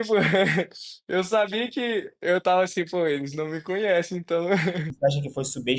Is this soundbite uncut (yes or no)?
no